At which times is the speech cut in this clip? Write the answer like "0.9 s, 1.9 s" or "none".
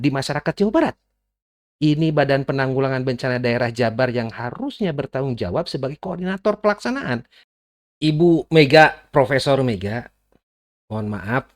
7.4 s